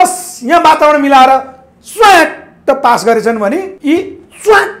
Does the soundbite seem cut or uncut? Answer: cut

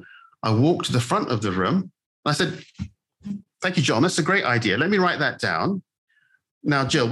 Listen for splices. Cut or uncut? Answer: cut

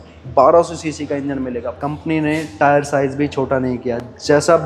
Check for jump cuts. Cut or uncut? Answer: cut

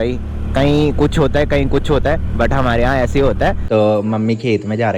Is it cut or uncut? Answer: cut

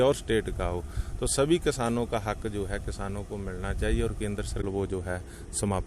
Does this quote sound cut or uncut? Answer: cut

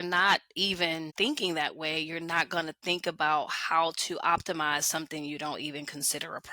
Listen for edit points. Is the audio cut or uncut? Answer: cut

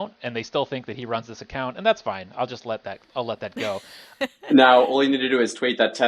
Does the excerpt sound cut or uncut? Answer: cut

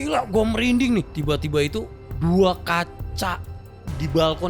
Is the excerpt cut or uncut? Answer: cut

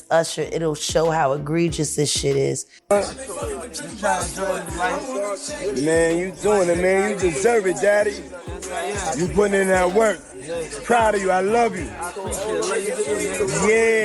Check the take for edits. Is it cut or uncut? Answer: cut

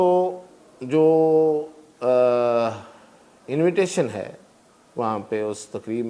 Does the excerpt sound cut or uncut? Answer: uncut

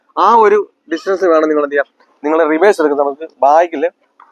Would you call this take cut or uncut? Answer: uncut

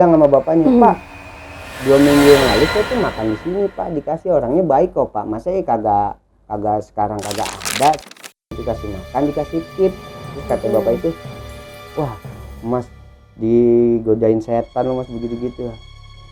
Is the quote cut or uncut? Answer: cut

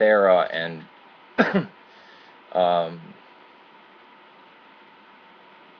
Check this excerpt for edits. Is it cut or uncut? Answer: uncut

